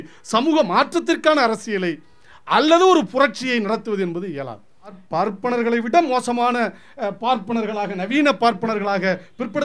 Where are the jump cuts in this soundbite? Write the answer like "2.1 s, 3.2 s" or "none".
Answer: 5.0 s